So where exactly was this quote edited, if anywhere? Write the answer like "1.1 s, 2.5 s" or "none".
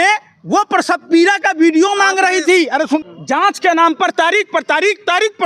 3.0 s